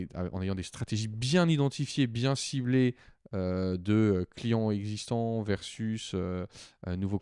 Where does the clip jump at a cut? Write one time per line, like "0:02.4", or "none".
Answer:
none